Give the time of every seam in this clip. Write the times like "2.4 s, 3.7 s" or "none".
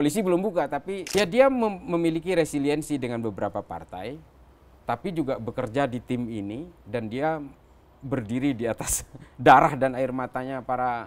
1.1 s

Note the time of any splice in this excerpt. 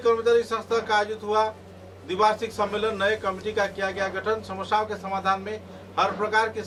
none

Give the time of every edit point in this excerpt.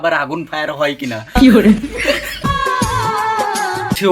1.5 s, 2.5 s

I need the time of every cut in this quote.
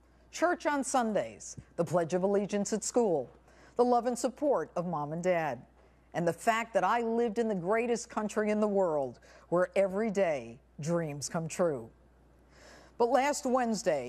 7.7 s

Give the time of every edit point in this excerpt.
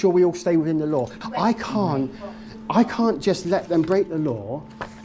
1.2 s

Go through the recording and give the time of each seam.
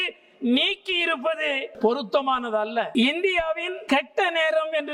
1.7 s, 2.9 s, 3.7 s

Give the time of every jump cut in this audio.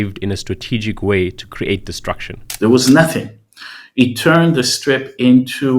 2.4 s

